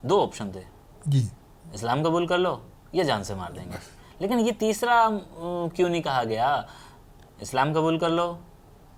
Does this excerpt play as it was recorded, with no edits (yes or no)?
yes